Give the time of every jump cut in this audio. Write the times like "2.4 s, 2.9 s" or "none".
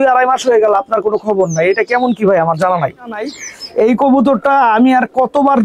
3.3 s